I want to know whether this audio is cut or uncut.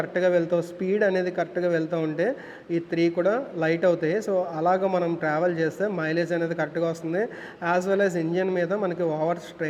uncut